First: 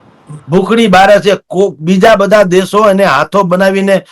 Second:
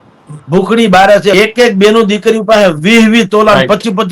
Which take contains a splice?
second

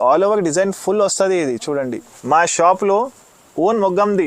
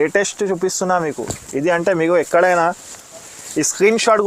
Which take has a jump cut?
first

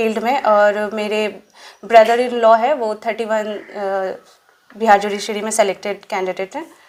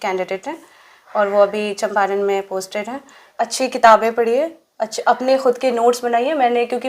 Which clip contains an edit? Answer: second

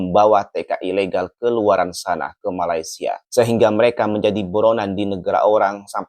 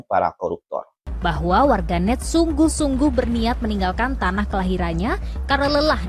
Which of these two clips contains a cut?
second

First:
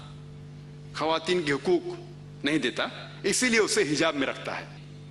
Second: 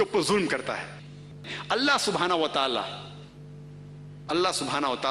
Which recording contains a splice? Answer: second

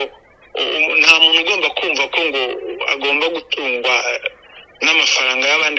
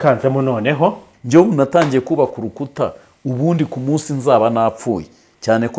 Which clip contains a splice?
second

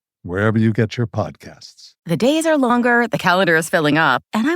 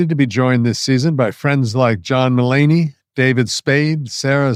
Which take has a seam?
first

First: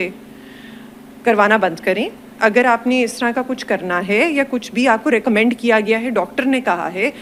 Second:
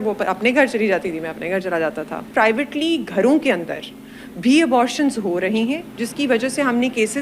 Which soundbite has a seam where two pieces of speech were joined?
second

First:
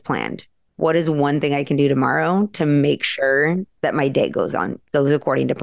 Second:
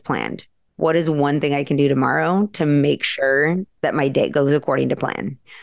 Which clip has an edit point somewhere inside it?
second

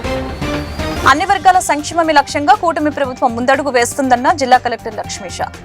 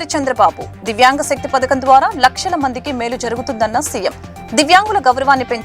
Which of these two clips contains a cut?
first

